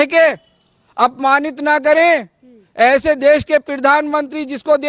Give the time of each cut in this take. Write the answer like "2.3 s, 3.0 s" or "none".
none